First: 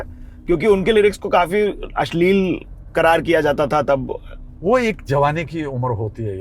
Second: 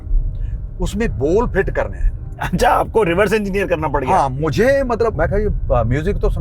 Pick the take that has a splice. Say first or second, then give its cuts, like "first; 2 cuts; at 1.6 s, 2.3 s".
second; 1 cut; at 5.1 s